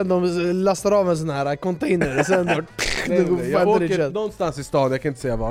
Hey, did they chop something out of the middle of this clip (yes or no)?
no